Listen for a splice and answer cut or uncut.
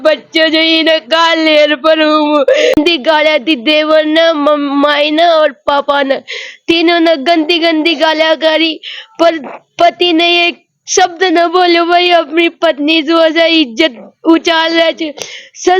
cut